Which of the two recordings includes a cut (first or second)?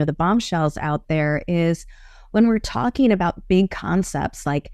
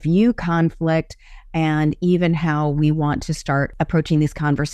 second